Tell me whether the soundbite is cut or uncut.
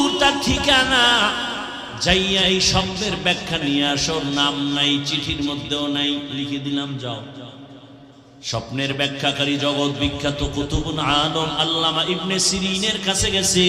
cut